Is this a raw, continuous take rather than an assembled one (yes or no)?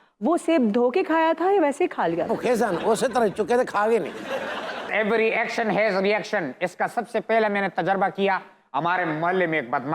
no